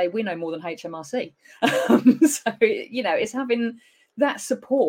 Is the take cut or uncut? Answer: uncut